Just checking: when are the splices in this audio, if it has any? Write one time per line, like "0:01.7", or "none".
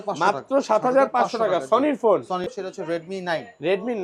0:02.6